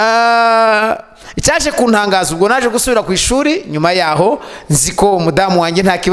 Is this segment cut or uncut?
uncut